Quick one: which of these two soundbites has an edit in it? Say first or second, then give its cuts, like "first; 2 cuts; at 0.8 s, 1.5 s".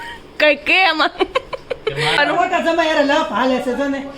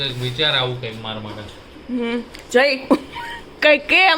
first; 1 cut; at 2.2 s